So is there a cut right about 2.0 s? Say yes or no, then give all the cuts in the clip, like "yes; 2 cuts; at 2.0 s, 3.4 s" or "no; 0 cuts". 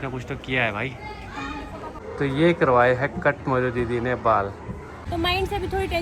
yes; 2 cuts; at 2.0 s, 5.0 s